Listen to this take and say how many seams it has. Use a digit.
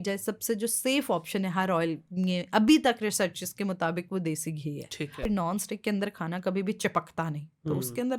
1